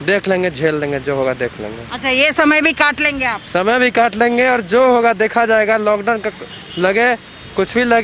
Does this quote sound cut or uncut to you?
uncut